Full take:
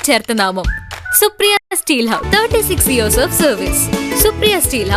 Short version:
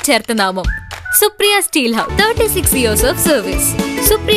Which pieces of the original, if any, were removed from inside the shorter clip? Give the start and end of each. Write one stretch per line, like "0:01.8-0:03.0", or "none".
0:01.6-0:01.8